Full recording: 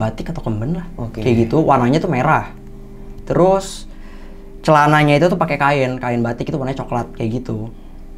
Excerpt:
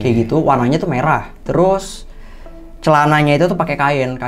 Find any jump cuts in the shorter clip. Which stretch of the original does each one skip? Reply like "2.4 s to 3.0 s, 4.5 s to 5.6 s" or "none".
2.6 s to 3.2 s